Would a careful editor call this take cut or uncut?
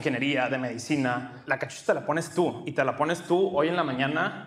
cut